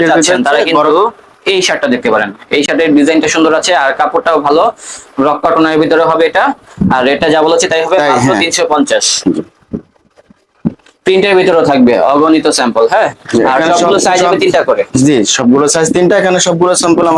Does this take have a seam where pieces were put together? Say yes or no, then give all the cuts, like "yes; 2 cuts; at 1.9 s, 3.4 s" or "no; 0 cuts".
no; 0 cuts